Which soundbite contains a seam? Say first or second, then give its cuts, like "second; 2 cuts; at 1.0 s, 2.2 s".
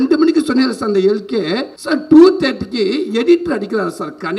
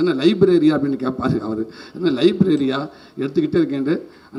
first; 1 cut; at 1.7 s